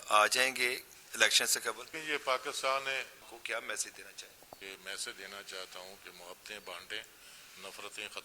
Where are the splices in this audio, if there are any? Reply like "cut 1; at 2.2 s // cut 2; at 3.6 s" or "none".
cut 1; at 2.0 s // cut 2; at 3.2 s // cut 3; at 4.6 s